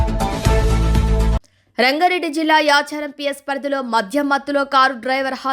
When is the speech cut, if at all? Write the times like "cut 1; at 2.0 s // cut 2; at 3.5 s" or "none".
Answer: none